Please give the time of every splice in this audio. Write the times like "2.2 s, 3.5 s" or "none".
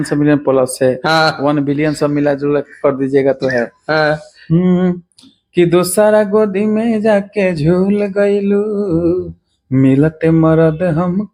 none